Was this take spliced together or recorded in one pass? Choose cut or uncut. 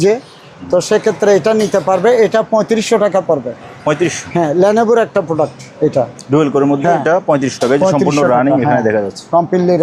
uncut